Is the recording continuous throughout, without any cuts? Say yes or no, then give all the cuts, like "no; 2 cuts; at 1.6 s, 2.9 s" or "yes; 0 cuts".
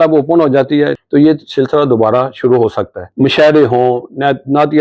no; 2 cuts; at 1.0 s, 3.0 s